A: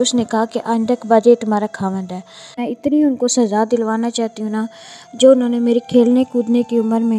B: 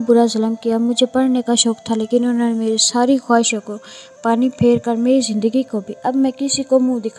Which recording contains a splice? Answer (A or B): A